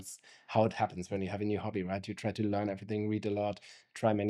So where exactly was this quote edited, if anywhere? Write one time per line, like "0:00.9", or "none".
none